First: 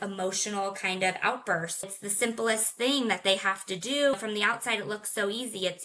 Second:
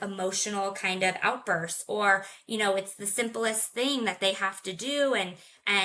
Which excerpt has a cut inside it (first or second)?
first